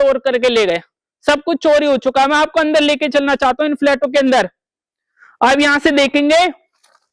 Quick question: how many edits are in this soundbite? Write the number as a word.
zero